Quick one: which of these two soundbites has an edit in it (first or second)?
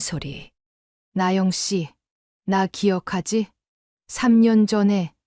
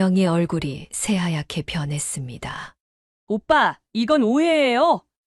first